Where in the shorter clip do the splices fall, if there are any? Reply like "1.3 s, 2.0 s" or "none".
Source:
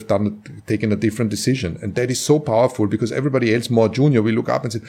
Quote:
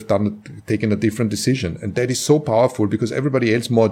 none